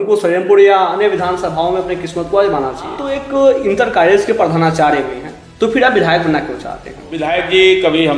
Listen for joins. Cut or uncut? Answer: cut